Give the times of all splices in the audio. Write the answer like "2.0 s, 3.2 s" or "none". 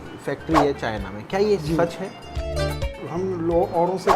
2.6 s